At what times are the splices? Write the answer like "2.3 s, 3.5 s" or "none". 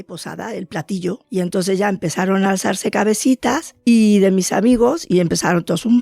1.2 s, 3.7 s